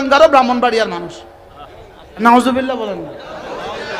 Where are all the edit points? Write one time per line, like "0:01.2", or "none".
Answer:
0:02.2